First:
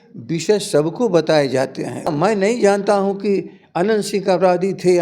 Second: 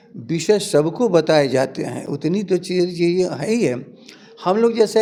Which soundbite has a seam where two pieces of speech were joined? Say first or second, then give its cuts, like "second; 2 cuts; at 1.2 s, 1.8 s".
first; 1 cut; at 2.1 s